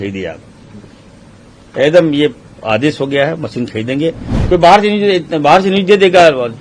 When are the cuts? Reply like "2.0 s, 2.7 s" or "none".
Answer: 4.3 s